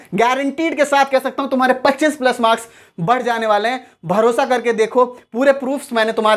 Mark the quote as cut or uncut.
uncut